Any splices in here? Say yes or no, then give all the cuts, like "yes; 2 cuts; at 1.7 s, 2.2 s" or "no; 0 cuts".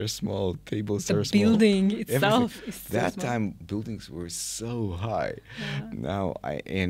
no; 0 cuts